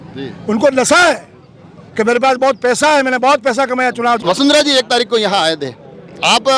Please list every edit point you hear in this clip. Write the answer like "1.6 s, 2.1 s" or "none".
4.2 s